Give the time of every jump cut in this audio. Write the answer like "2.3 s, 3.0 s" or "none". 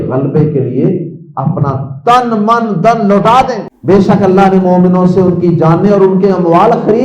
3.7 s

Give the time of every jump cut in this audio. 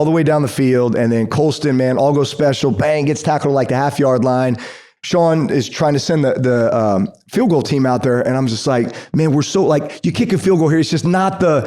4.8 s

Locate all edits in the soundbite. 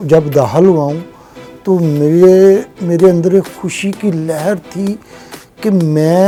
none

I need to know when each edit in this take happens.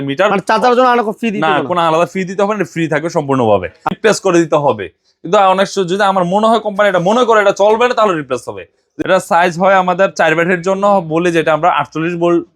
4.0 s, 8.9 s

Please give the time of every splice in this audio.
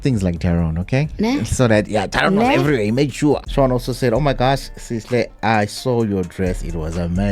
3.5 s

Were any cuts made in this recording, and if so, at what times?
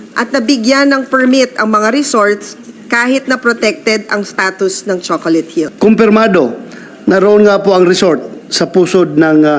5.7 s

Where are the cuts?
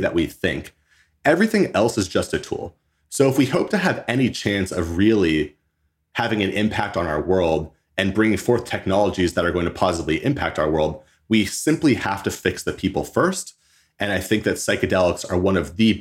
none

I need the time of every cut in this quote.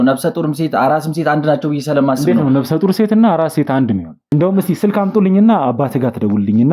4.2 s

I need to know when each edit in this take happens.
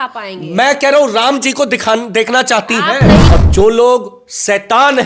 3.3 s

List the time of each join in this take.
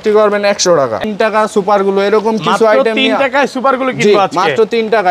1.0 s

